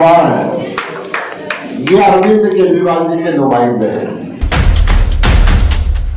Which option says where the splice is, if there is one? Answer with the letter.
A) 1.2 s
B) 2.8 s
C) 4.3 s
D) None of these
C